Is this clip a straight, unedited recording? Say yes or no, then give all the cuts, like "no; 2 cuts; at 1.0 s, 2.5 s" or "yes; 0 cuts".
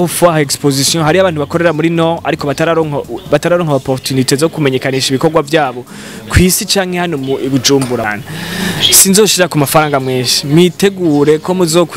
no; 1 cut; at 8.0 s